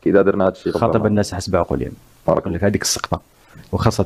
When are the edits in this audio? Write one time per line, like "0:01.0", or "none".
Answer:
0:02.5